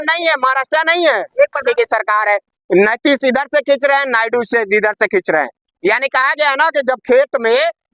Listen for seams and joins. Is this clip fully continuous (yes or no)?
no